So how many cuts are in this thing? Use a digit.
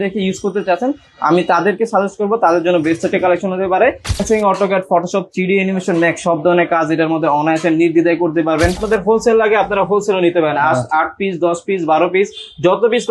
2